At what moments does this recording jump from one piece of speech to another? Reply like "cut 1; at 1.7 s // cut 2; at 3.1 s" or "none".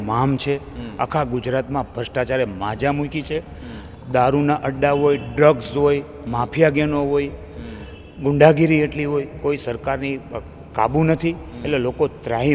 none